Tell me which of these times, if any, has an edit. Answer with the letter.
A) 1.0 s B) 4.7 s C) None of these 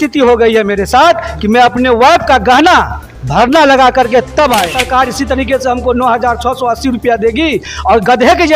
B